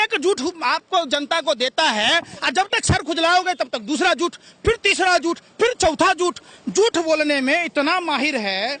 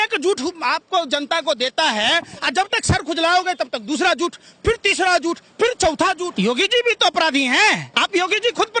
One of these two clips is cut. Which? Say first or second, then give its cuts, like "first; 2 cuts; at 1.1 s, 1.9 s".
second; 2 cuts; at 6.3 s, 7.9 s